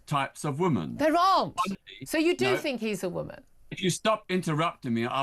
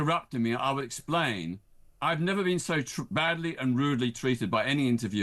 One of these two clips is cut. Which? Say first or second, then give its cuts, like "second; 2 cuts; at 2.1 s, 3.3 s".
first; 1 cut; at 1.8 s